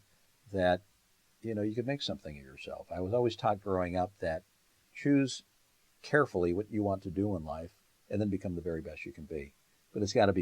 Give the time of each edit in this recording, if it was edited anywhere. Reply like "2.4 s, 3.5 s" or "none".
4.5 s